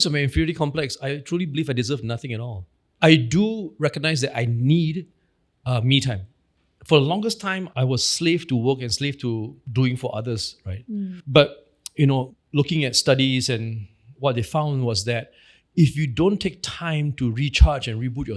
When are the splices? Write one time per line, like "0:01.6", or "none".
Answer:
0:01.1
0:02.6
0:09.6
0:12.4